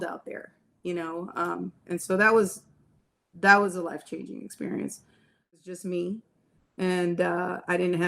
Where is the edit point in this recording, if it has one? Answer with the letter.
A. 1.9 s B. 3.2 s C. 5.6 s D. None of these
C